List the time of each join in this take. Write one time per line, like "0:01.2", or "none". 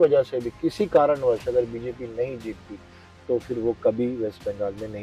none